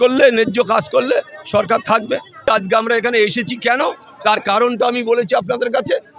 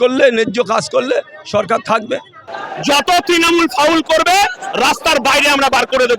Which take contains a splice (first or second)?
second